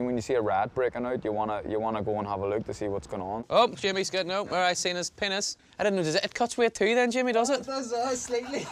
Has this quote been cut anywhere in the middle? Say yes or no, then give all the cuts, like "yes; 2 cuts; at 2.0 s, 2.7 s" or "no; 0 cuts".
yes; 2 cuts; at 3.4 s, 5.6 s